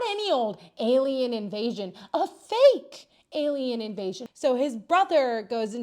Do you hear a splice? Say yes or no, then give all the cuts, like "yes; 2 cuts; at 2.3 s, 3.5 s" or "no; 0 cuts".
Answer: no; 0 cuts